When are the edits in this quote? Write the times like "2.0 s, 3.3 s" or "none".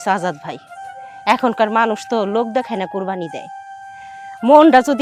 none